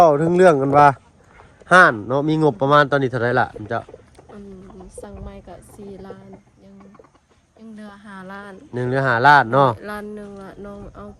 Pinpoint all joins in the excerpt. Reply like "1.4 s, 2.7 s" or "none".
none